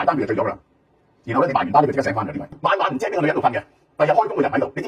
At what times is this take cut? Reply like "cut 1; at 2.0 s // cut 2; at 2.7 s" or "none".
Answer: cut 1; at 2.5 s